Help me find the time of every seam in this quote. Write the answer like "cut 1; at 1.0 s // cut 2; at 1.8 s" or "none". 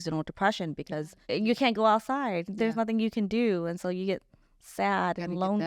cut 1; at 1.1 s